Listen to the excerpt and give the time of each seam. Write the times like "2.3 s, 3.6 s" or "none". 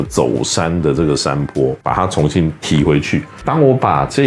1.8 s, 3.3 s